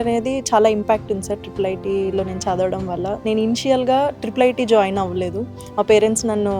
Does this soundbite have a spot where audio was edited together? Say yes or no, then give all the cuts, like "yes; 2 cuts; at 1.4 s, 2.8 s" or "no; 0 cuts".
no; 0 cuts